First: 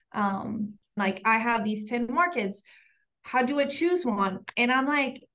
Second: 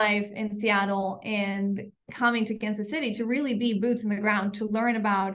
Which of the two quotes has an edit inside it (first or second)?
first